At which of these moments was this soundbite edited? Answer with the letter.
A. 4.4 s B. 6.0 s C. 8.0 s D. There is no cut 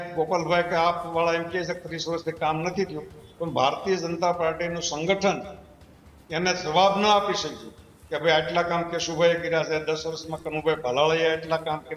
D